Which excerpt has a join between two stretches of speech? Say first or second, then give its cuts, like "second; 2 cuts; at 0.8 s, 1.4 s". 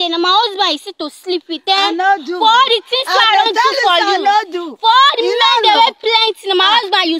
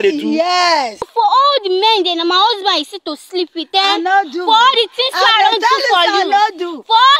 second; 1 cut; at 1.1 s